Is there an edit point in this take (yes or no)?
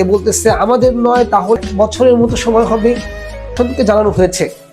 yes